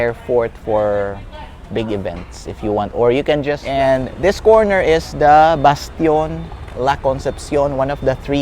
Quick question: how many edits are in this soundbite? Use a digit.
1